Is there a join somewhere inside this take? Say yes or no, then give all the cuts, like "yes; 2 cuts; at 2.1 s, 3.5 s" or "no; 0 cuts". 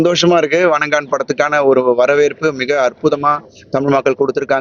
no; 0 cuts